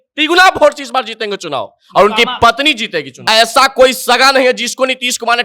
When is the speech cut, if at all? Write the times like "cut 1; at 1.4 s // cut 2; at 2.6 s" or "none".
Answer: cut 1; at 3.1 s